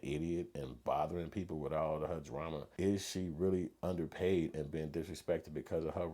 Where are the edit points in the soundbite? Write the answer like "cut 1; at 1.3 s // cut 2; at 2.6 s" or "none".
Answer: cut 1; at 2.6 s